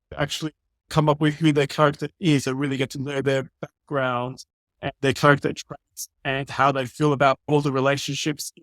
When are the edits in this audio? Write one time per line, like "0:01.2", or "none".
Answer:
0:00.9